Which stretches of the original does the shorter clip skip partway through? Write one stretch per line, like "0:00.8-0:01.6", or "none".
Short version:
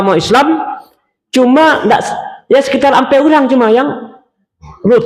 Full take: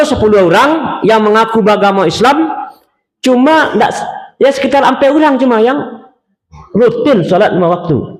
none